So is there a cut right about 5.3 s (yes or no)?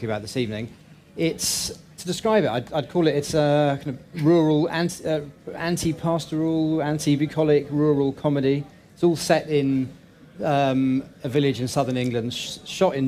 yes